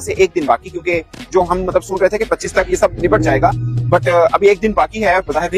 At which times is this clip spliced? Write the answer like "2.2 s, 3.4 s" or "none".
1.2 s

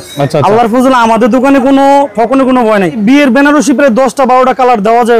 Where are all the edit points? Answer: 3.0 s

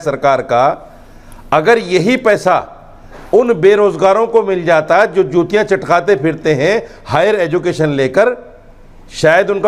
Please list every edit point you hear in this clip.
none

